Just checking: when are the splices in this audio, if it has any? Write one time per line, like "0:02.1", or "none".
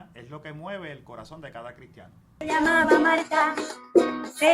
0:02.3